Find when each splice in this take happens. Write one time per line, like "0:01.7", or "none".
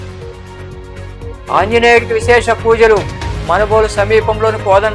0:01.0